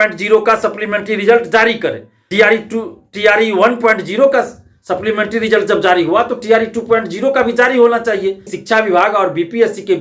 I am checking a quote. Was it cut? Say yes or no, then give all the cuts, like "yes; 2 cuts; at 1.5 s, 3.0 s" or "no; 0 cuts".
yes; 2 cuts; at 2.2 s, 8.5 s